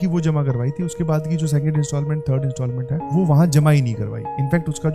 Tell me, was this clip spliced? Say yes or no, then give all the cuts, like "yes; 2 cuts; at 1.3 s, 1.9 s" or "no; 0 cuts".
no; 0 cuts